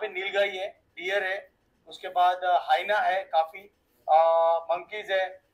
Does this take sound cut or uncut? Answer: uncut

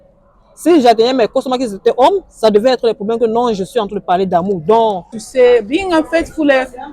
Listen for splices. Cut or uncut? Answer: cut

